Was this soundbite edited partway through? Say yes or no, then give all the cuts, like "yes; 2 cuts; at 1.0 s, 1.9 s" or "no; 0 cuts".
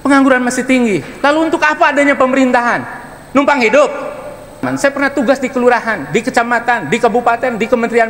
yes; 1 cut; at 4.6 s